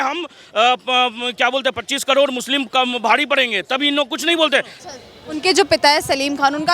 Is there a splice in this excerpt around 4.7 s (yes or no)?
yes